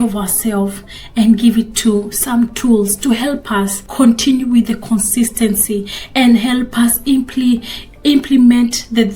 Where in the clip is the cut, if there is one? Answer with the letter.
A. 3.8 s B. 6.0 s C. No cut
A